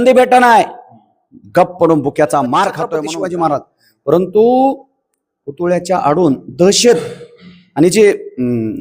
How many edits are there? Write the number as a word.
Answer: one